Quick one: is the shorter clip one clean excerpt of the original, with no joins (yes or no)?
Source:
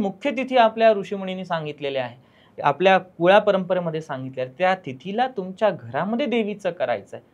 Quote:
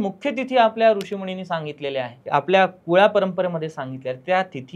no